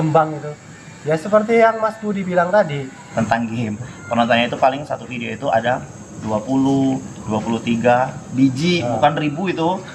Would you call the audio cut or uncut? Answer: cut